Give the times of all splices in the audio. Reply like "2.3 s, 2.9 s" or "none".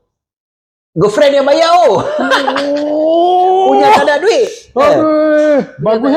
none